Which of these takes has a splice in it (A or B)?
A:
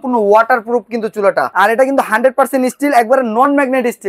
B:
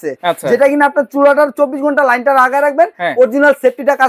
A